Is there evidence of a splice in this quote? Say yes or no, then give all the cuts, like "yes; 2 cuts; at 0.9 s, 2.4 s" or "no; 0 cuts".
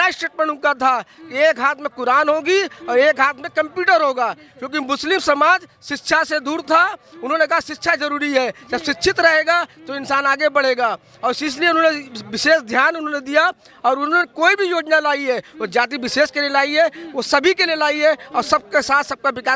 no; 0 cuts